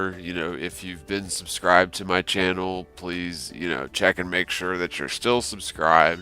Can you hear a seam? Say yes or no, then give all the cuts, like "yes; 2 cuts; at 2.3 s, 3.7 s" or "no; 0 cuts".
no; 0 cuts